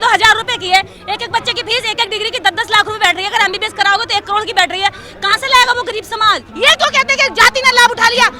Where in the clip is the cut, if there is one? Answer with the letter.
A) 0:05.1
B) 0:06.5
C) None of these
B